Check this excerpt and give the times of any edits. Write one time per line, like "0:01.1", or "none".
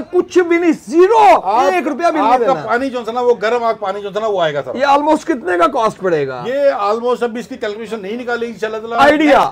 none